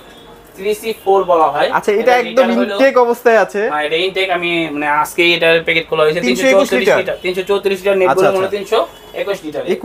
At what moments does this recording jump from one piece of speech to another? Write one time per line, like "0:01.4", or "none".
none